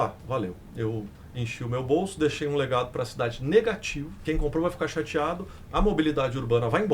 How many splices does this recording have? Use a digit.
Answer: 1